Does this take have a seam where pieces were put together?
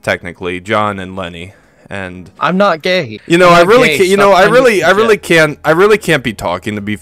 yes; 1 cut; at 3.2 s

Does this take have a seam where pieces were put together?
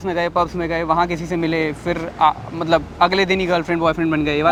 no; 0 cuts

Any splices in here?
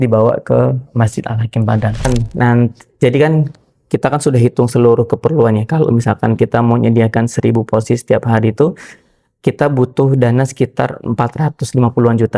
yes; 1 cut; at 2.1 s

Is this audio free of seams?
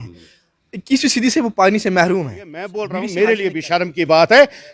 no; 1 cut; at 2.8 s

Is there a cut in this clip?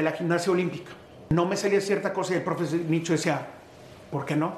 yes; 1 cut; at 1.3 s

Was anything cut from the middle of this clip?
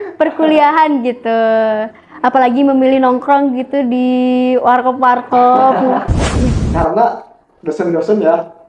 yes; 1 cut; at 6.6 s

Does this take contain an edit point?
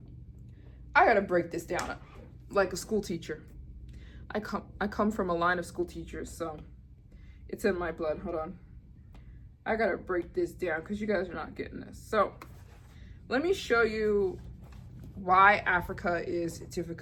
no; 0 cuts

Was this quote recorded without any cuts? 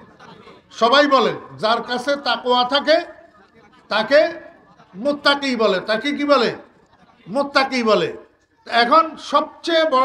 yes; 0 cuts

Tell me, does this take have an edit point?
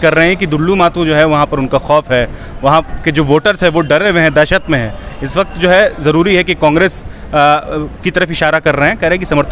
no; 0 cuts

